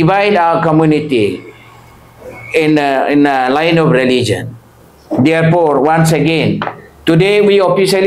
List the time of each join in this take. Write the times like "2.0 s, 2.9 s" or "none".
none